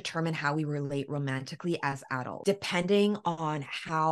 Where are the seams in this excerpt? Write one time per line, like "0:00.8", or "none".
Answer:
0:02.3